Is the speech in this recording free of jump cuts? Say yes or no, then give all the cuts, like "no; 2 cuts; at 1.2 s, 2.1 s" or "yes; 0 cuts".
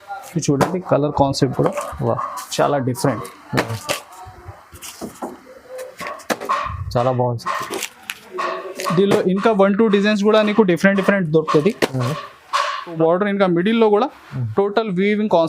no; 1 cut; at 12.9 s